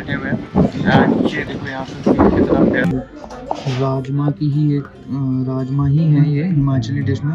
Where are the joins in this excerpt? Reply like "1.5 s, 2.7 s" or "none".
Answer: 2.8 s